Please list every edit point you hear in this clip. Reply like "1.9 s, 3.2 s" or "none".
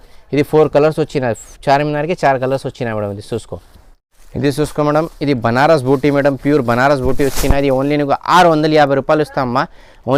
none